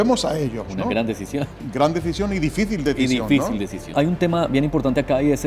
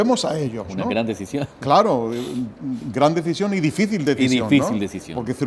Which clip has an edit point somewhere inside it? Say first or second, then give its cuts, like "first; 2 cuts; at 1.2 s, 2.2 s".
first; 2 cuts; at 1.6 s, 3.9 s